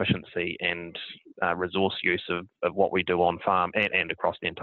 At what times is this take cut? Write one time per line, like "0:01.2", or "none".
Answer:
none